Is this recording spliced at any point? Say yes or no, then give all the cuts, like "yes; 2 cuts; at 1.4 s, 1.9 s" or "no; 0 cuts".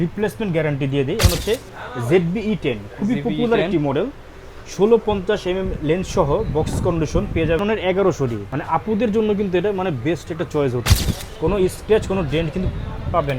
yes; 4 cuts; at 1.2 s, 7.6 s, 8.5 s, 10.9 s